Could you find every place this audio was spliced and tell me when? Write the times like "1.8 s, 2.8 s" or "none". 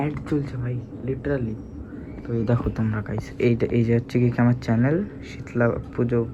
none